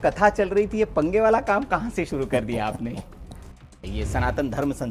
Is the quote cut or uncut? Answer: cut